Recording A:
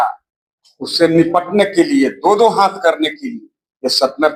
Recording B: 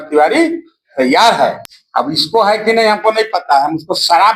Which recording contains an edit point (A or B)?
B